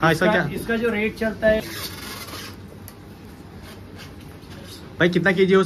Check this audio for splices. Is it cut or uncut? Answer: cut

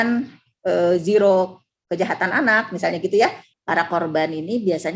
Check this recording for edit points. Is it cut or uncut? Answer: cut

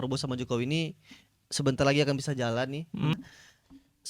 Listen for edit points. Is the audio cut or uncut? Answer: cut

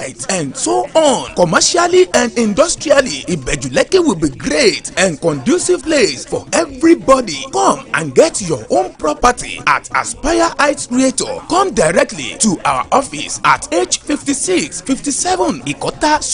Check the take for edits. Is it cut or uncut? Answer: uncut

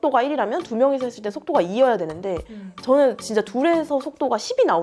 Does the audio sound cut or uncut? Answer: uncut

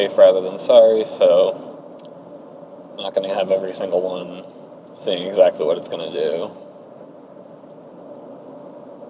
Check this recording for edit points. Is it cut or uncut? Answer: uncut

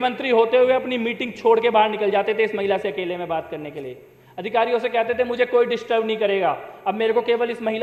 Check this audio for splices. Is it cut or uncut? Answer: uncut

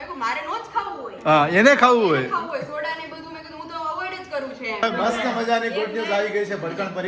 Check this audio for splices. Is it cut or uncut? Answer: cut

